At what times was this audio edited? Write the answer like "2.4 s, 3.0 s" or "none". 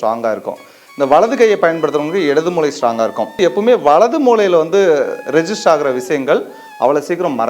3.4 s

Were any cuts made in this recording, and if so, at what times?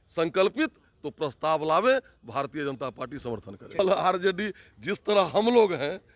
3.8 s

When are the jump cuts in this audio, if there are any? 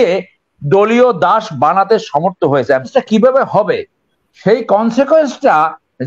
2.9 s

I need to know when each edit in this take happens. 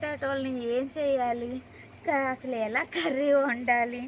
none

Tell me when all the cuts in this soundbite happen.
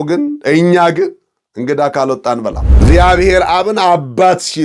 2.7 s

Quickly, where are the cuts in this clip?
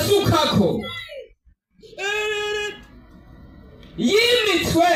none

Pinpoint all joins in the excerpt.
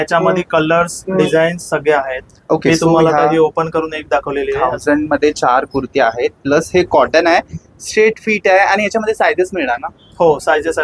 none

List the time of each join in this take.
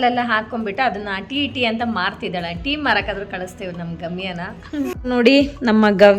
4.9 s

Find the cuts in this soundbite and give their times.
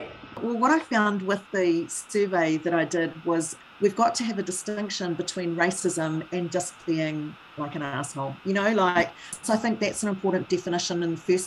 9.2 s

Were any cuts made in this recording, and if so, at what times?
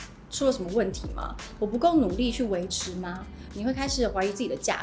3.4 s

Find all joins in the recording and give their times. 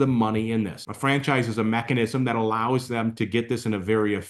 none

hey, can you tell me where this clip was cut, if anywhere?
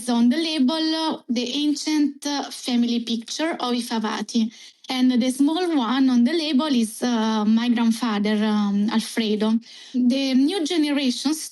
10.0 s

